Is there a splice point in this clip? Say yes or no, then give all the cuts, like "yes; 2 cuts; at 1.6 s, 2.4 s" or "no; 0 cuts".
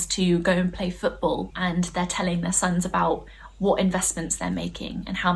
yes; 1 cut; at 1.5 s